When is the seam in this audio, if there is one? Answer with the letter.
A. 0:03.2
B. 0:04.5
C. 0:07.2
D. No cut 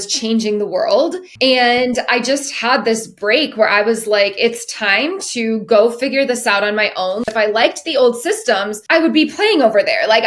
C